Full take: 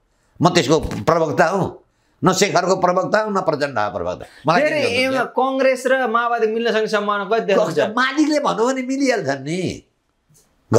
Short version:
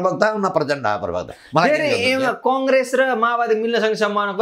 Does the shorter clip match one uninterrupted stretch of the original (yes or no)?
yes